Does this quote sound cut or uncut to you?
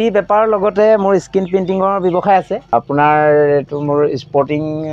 cut